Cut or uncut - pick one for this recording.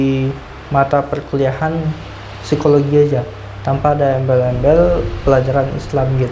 uncut